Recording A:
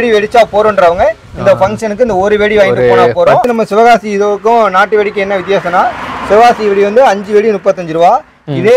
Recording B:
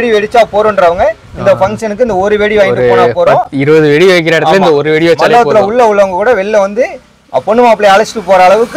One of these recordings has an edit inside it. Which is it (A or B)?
A